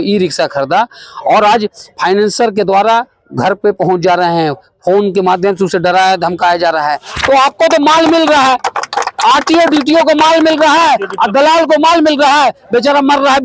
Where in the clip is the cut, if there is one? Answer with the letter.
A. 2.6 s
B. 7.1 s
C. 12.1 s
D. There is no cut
B